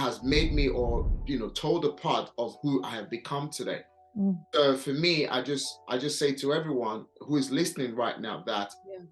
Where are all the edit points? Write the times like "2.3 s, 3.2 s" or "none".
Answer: 1.1 s